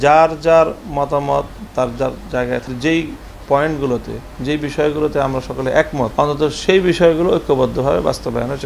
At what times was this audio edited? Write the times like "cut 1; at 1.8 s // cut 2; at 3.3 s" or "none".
cut 1; at 2.7 s // cut 2; at 6.1 s